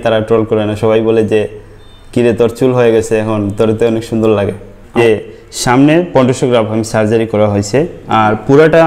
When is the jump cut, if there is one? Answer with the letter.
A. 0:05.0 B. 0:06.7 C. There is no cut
A